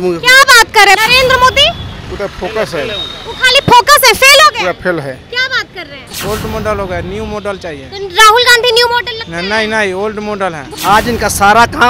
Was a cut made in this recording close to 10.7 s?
yes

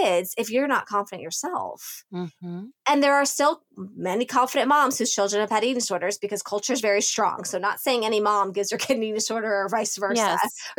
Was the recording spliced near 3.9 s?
no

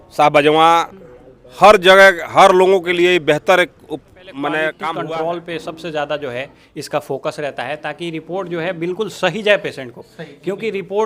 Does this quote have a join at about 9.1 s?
no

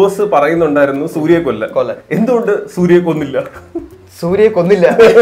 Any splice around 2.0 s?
yes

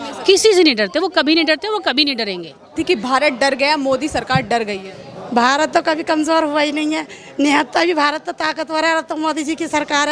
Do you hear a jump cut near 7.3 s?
no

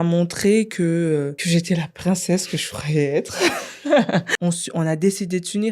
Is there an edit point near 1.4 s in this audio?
yes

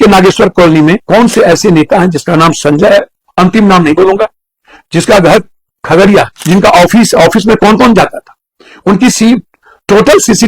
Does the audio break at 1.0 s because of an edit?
yes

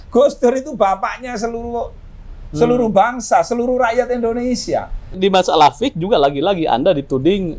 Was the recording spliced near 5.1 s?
yes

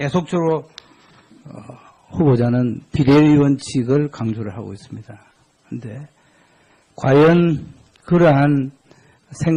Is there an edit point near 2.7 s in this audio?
no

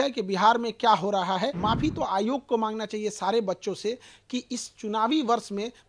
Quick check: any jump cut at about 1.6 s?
yes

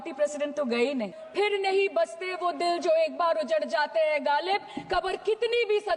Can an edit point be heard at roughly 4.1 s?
no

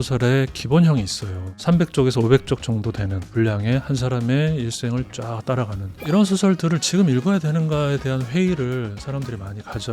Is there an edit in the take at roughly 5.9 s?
yes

